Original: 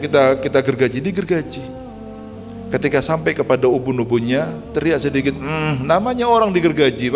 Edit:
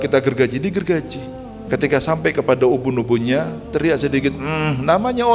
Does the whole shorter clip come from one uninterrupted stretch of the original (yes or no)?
no